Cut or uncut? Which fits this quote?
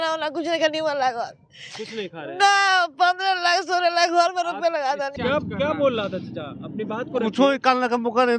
cut